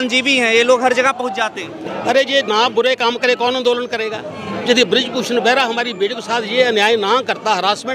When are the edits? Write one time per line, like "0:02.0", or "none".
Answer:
none